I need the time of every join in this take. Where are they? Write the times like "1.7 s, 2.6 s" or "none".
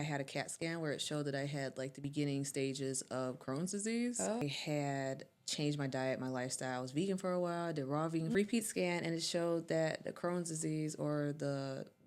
4.4 s, 8.3 s